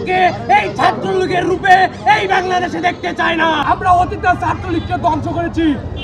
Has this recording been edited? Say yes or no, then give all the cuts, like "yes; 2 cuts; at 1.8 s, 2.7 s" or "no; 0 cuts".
yes; 1 cut; at 3.6 s